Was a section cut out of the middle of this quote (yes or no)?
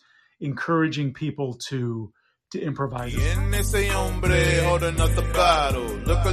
yes